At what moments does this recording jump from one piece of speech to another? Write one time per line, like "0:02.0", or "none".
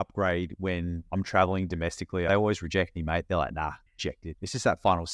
0:01.0
0:02.3
0:04.0